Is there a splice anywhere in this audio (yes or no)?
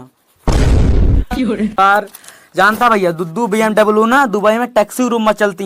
yes